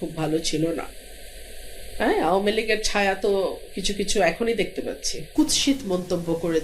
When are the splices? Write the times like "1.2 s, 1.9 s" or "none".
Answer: 5.2 s